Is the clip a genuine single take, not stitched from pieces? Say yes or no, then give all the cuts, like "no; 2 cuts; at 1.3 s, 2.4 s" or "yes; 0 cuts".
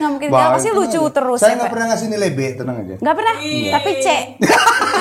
yes; 0 cuts